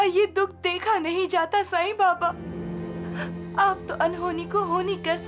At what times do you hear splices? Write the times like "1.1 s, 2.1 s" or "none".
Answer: 2.5 s